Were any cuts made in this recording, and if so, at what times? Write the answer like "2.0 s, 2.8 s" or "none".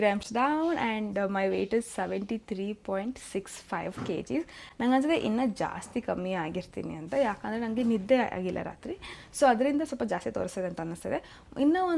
none

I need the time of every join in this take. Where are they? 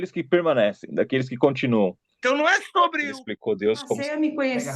2.1 s

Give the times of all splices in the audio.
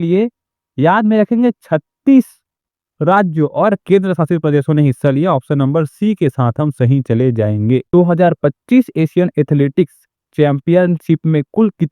7.8 s

